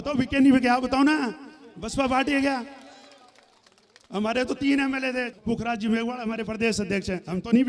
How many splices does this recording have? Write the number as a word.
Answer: one